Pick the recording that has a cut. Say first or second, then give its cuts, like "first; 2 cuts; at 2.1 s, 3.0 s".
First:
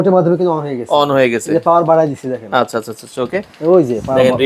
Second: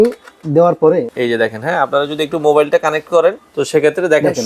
second; 2 cuts; at 1.1 s, 3.5 s